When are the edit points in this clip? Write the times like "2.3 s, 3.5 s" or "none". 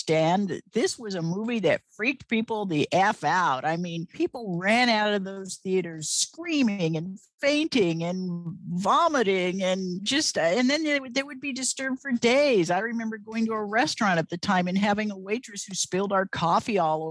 none